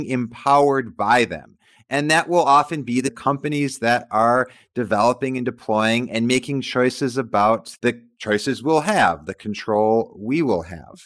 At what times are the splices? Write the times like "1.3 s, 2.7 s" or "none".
none